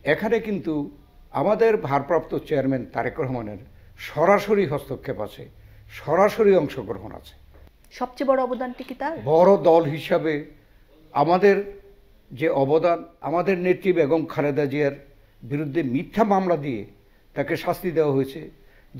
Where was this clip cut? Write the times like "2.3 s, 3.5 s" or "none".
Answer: 13.1 s